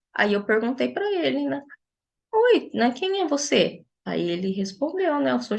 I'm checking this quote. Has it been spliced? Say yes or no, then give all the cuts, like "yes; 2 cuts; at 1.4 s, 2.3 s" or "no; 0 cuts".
no; 0 cuts